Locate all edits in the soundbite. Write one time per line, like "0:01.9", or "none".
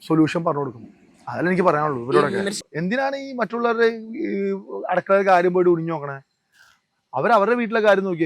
0:02.6